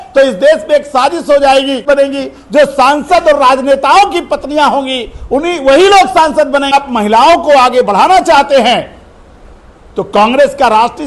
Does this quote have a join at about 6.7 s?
yes; 2 cuts; at 1.8 s, 6.7 s

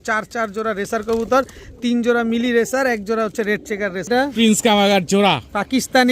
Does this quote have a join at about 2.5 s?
no; 1 cut; at 4.1 s

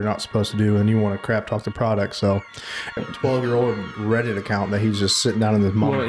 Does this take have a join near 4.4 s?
no; 1 cut; at 2.9 s

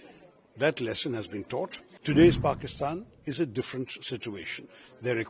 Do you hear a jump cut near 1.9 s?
yes; 1 cut; at 1.9 s

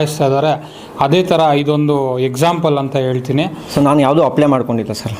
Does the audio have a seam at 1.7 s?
no; 1 cut; at 3.6 s

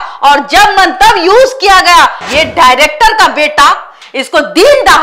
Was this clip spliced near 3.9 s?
no; 1 cut; at 2.2 s

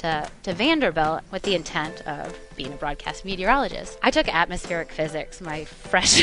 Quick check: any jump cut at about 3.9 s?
yes; 2 cuts; at 1.2 s, 3.9 s

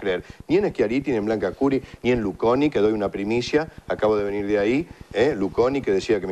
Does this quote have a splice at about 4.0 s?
yes; 1 cut; at 4.0 s

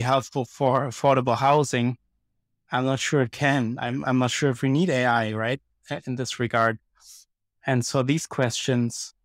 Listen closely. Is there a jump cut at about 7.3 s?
no; 0 cuts

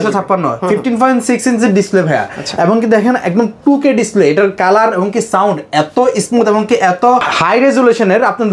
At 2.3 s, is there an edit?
no; 0 cuts

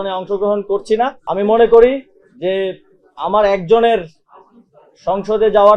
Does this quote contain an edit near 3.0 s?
no; 1 cut; at 1.2 s

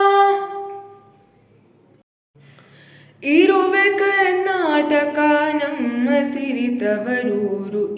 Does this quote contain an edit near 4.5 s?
no; 1 cut; at 2.0 s

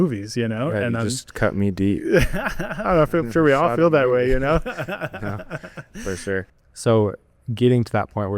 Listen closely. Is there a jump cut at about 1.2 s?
no; 1 cut; at 6.5 s

